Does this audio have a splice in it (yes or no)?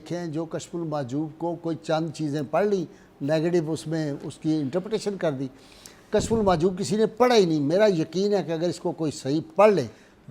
no